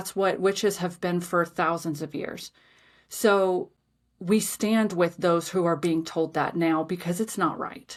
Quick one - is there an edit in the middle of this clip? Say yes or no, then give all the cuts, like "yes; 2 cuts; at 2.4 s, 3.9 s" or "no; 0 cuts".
no; 0 cuts